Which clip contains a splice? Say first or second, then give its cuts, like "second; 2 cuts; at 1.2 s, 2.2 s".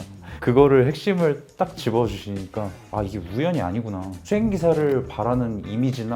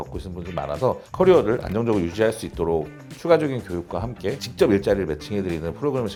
first; 1 cut; at 2.8 s